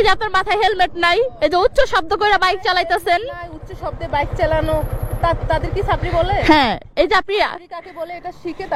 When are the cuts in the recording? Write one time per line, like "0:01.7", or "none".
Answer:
0:01.4